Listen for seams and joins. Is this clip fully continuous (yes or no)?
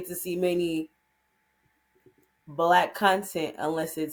yes